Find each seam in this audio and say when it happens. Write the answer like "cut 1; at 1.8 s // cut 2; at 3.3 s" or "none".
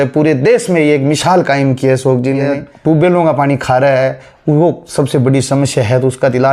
cut 1; at 2.6 s